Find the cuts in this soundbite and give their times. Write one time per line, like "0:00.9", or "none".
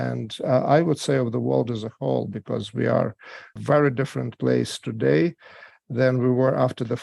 0:03.5

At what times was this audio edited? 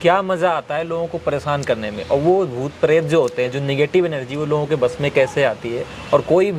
none

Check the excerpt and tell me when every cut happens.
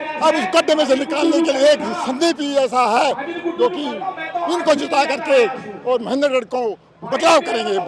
none

